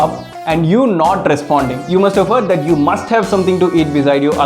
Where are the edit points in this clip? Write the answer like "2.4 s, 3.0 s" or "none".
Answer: 1.8 s